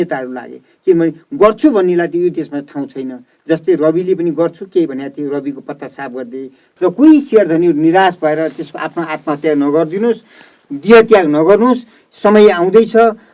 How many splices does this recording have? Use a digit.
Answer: 1